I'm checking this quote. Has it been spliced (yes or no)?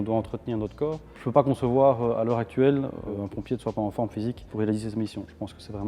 yes